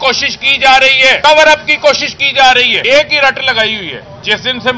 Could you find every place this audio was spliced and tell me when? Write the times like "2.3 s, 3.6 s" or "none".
1.2 s, 2.8 s